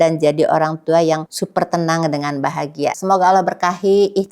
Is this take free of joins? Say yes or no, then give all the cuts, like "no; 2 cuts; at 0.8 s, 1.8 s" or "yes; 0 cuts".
yes; 0 cuts